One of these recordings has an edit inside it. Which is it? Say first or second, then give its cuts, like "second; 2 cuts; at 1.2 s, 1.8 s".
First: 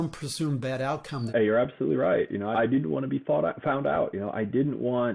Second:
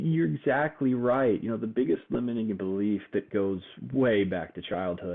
first; 2 cuts; at 1.3 s, 2.5 s